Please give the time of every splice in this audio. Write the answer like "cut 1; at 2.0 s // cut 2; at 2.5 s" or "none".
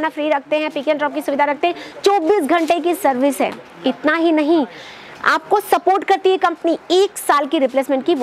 none